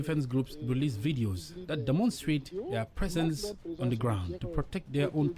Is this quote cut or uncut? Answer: cut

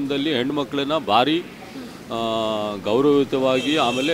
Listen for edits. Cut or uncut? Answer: uncut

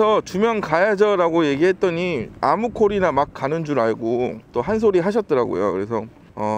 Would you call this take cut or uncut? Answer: uncut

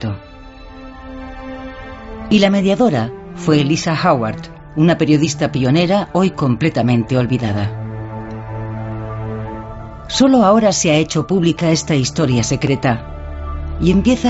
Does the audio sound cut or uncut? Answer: uncut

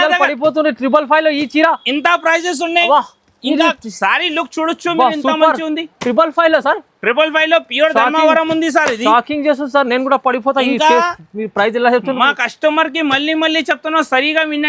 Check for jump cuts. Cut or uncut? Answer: uncut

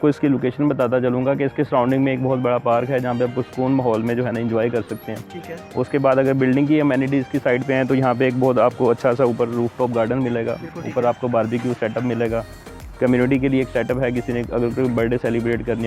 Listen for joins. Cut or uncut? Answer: uncut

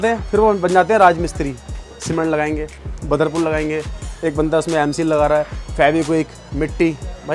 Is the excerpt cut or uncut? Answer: uncut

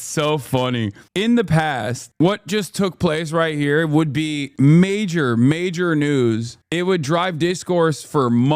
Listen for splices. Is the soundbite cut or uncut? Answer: uncut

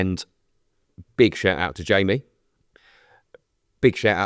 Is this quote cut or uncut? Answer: uncut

